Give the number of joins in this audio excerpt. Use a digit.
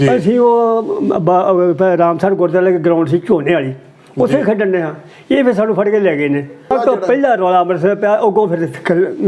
1